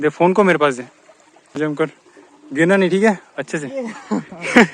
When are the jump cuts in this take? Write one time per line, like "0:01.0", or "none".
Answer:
0:01.6

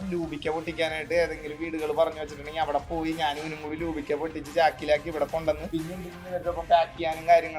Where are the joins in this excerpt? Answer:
0:05.6

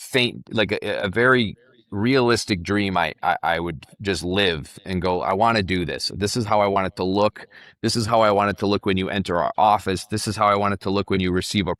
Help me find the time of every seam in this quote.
none

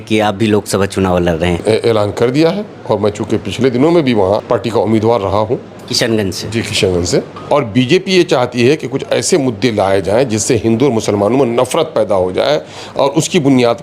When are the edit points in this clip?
0:01.6
0:04.4
0:07.4

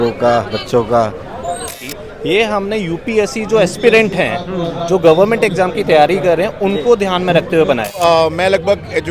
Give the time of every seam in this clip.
0:01.7
0:08.0

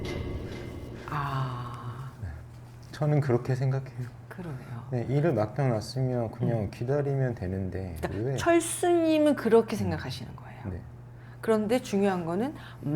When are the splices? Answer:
0:01.1

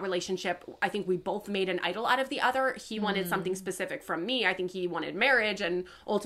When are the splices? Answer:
none

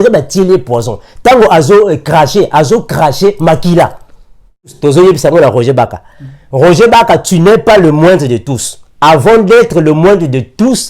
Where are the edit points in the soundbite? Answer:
0:04.8

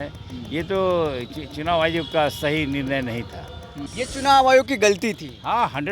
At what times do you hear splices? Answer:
0:03.8

